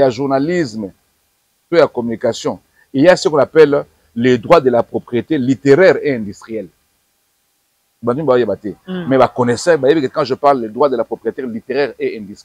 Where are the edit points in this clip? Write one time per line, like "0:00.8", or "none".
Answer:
none